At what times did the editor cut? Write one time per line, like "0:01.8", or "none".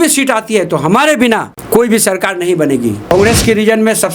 0:01.5
0:03.1